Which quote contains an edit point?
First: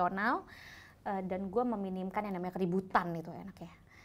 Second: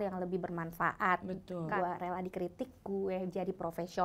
second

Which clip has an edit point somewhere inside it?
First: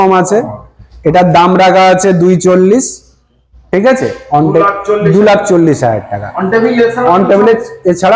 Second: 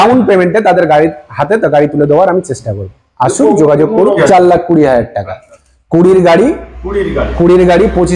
second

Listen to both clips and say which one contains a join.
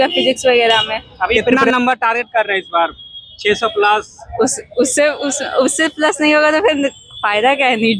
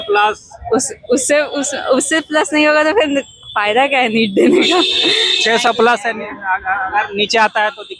first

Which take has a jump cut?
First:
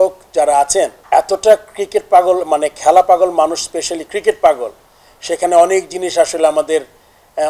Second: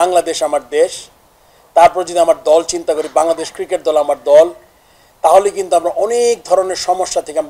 first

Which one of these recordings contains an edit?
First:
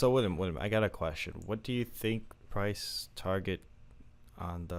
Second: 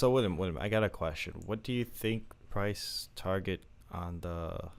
second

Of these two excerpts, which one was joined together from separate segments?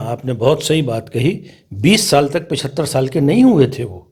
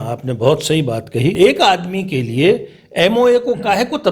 second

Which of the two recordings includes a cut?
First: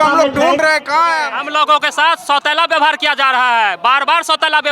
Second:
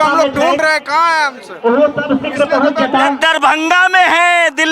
first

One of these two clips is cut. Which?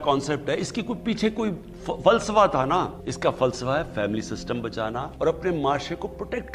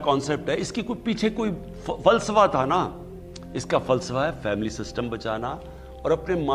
first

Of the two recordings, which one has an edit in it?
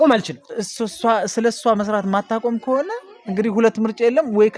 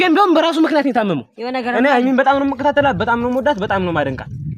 second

